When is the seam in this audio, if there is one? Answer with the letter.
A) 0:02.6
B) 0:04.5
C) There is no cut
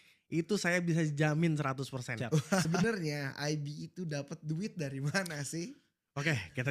A